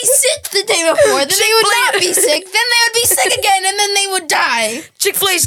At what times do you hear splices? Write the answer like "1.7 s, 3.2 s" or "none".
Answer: none